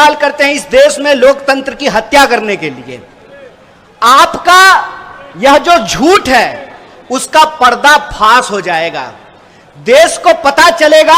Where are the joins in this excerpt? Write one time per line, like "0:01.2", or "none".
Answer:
none